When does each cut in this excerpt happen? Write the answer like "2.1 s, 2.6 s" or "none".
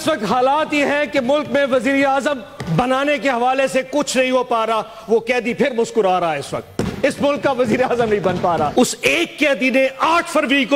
8.7 s